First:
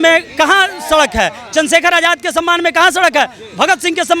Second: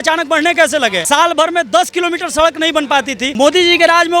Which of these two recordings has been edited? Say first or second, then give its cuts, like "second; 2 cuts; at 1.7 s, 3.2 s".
second; 2 cuts; at 1.0 s, 3.2 s